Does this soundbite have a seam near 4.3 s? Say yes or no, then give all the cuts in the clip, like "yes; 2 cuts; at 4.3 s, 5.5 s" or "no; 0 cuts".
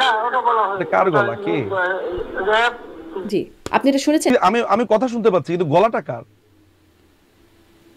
yes; 1 cut; at 4.3 s